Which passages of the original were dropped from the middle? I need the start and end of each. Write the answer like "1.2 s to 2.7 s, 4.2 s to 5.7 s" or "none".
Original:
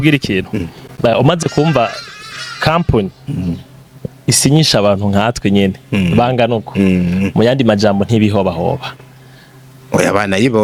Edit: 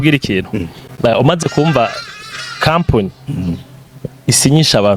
none